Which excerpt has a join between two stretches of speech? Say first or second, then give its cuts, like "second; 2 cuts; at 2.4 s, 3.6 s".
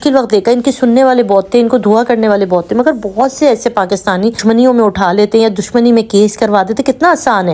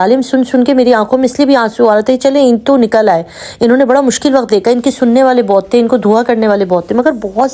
first; 1 cut; at 4.4 s